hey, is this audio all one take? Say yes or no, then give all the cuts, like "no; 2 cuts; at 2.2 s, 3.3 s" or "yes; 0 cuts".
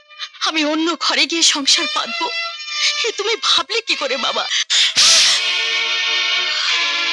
no; 1 cut; at 4.7 s